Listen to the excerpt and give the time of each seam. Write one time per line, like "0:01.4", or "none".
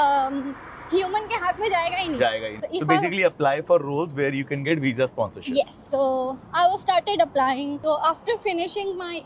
0:02.5
0:07.8